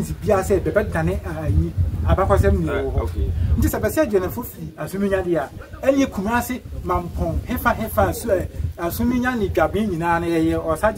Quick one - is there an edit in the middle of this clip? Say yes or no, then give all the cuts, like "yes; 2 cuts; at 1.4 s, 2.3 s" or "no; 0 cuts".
no; 0 cuts